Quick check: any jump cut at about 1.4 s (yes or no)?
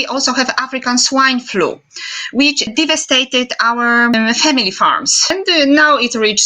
no